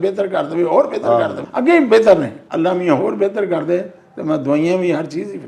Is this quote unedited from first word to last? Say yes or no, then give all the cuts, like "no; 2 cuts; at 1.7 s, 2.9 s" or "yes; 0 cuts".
no; 2 cuts; at 1.4 s, 2.4 s